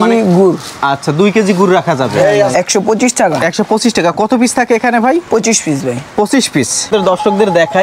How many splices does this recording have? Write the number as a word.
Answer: two